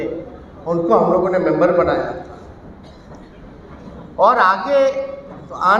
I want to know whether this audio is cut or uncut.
uncut